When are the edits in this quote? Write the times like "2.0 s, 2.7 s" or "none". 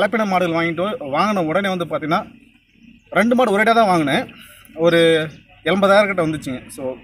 none